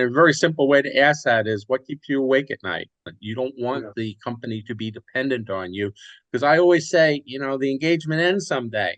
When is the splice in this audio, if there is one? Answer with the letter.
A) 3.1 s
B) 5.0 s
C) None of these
A